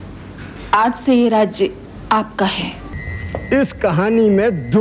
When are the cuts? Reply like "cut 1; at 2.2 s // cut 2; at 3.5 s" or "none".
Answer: cut 1; at 2.7 s